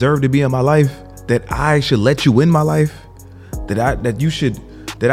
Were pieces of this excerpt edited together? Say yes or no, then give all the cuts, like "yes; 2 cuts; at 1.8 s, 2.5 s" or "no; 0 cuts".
yes; 1 cut; at 1.1 s